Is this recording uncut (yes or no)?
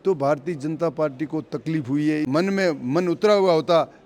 no